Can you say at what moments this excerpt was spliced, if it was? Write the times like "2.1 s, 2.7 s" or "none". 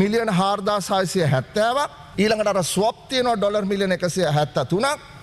2.0 s